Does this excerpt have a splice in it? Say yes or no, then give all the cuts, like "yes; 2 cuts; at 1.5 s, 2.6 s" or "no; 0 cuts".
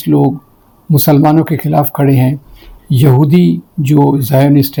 no; 0 cuts